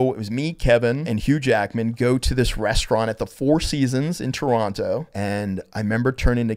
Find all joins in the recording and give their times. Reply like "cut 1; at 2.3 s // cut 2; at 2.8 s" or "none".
cut 1; at 1.1 s // cut 2; at 5.1 s